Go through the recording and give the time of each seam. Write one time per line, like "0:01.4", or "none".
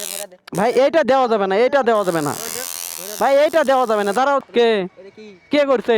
0:04.4

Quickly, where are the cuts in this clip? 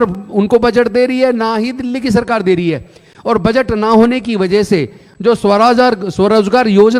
none

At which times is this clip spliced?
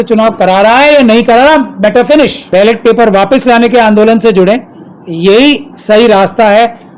0:02.4

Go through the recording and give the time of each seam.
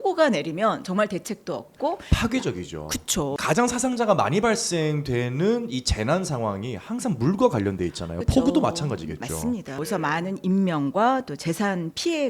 0:03.4
0:09.8

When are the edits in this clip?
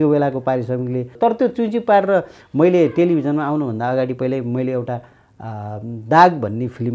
0:01.1

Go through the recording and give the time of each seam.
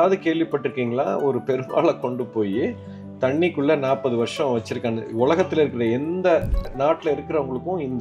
0:06.7

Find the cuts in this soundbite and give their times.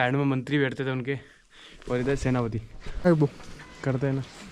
0:03.1

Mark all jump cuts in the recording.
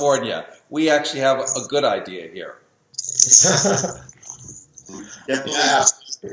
0:03.5

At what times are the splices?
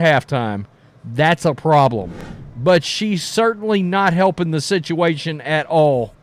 0:02.2

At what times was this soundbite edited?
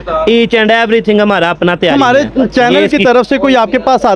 0:01.9

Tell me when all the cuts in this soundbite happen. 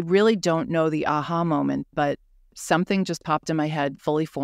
none

